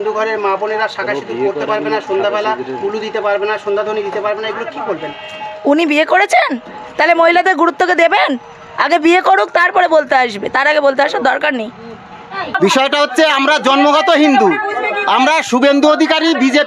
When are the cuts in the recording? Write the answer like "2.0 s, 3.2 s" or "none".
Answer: 12.5 s